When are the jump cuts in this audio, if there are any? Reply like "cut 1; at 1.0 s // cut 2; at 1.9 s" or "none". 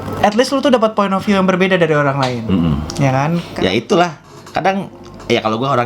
cut 1; at 3.5 s